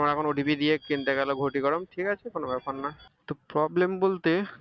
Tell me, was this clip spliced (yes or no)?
yes